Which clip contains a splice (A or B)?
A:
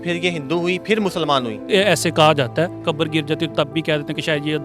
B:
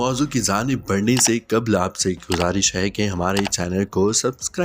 A